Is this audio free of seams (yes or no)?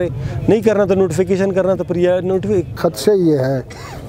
no